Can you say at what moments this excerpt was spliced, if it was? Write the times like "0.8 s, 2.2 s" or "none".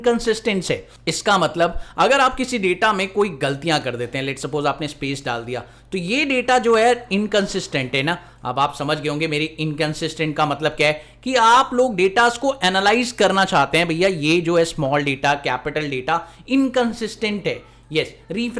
none